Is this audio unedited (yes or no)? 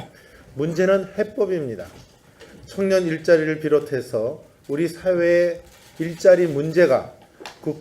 no